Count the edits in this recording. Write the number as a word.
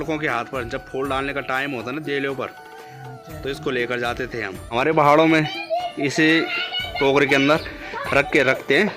one